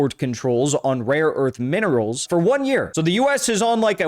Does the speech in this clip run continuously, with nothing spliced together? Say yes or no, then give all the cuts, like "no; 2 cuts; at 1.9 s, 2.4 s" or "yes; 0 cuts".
no; 2 cuts; at 2.2 s, 2.9 s